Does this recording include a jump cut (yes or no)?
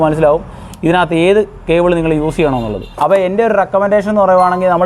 yes